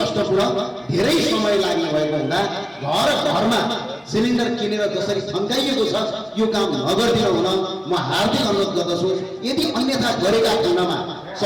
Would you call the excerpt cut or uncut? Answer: uncut